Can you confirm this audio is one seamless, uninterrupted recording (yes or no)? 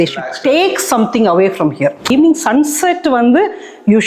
no